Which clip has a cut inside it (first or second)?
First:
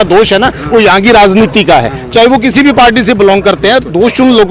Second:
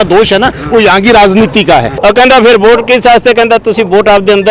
second